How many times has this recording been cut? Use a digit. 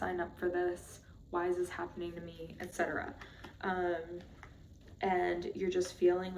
0